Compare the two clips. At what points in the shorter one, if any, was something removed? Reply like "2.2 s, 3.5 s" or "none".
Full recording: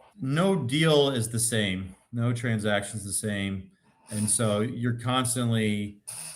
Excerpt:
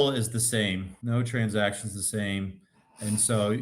0.9 s